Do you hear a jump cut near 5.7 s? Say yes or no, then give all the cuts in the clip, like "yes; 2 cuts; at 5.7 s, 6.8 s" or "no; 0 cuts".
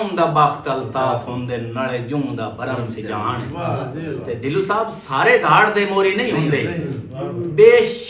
no; 0 cuts